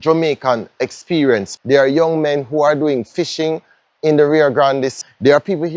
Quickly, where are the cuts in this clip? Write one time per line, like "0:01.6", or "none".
0:01.5
0:05.0